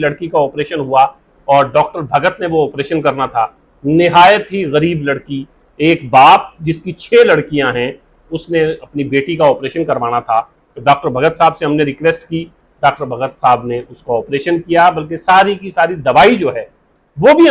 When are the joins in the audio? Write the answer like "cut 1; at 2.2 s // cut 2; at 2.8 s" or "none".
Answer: none